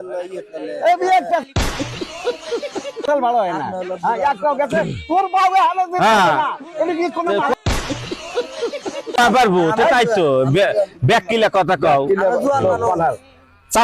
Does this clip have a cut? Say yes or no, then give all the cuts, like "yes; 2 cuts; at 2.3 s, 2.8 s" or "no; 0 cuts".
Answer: no; 0 cuts